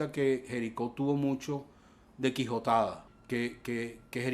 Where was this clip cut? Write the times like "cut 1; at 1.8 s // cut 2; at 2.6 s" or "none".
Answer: cut 1; at 3.1 s